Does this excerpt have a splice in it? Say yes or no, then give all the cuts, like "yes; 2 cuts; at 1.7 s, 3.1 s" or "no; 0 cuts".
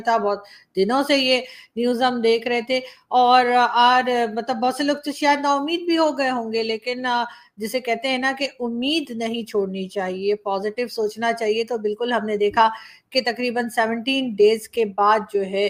no; 0 cuts